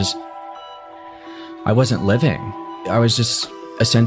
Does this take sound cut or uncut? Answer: uncut